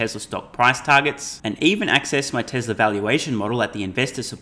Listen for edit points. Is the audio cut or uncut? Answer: uncut